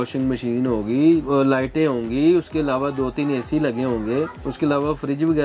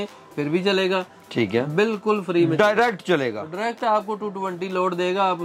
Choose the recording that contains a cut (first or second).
first